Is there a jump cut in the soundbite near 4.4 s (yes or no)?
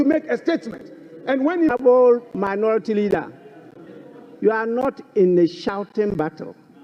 no